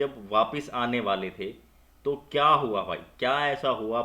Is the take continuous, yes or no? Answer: yes